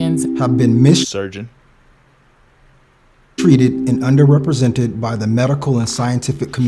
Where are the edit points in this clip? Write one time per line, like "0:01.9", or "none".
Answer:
none